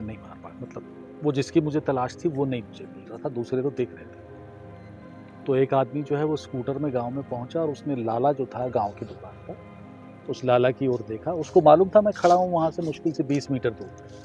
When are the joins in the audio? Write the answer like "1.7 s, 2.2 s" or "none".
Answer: none